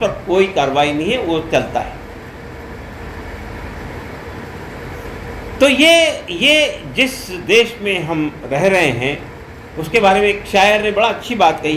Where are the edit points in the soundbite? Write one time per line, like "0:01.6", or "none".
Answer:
none